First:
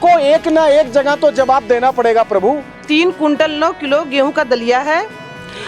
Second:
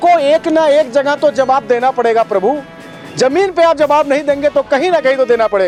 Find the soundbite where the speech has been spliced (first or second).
first